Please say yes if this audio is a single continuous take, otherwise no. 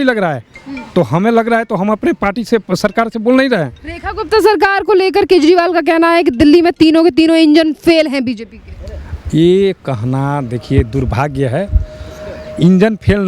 yes